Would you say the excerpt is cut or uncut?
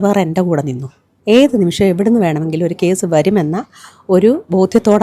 cut